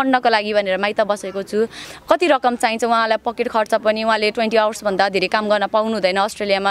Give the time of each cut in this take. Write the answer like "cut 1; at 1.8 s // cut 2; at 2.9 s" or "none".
cut 1; at 1.8 s